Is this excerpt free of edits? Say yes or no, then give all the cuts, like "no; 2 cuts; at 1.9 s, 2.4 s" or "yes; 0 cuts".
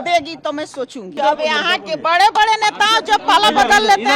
yes; 0 cuts